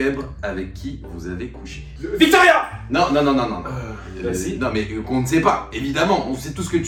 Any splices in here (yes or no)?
no